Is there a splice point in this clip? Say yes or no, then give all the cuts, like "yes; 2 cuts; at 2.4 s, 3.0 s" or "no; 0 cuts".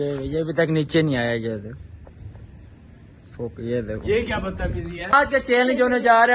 yes; 1 cut; at 5.1 s